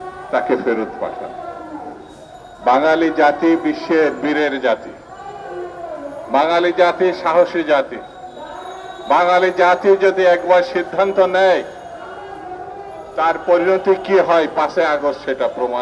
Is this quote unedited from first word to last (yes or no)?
yes